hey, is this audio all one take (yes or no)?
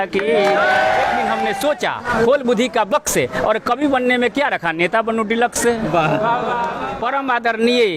no